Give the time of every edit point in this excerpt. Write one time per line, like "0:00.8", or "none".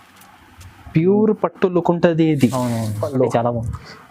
0:03.0